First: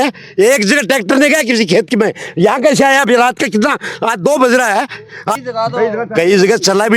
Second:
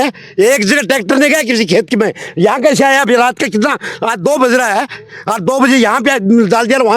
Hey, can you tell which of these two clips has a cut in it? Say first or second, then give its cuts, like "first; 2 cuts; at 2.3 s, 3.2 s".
first; 1 cut; at 5.4 s